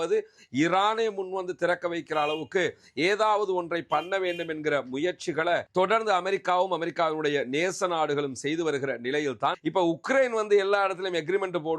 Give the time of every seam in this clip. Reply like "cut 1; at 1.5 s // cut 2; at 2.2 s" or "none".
cut 1; at 9.6 s